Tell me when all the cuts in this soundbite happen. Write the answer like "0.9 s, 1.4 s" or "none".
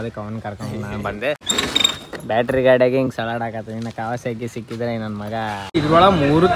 1.4 s, 5.8 s